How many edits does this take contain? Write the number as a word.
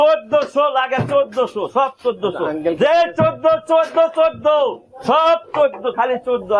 zero